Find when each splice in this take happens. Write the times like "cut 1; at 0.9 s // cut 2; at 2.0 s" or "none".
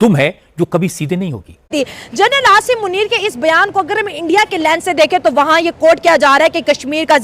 cut 1; at 1.6 s

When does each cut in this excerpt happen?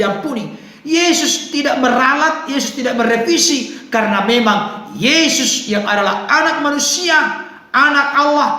none

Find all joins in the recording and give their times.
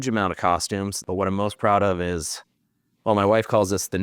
cut 1; at 1.0 s

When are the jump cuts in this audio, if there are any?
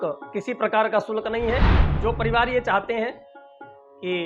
cut 1; at 1.8 s

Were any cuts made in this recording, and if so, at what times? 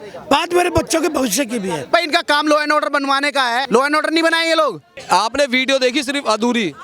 cut 1; at 1.8 s // cut 2; at 3.7 s // cut 3; at 4.9 s

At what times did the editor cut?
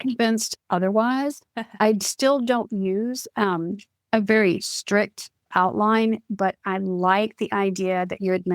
cut 1; at 3.9 s // cut 2; at 5.5 s

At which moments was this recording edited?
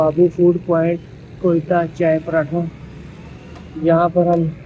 none

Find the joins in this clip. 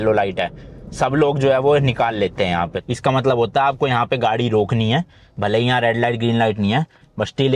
cut 1; at 2.8 s

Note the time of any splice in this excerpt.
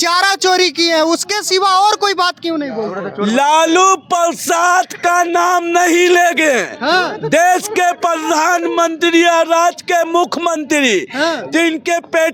none

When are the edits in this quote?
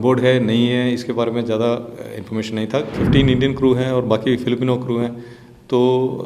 cut 1; at 3.0 s

